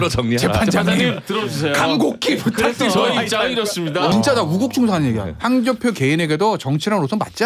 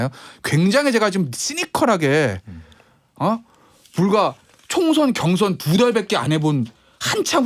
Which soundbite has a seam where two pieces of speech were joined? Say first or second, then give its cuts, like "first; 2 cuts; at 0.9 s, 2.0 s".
first; 1 cut; at 4.1 s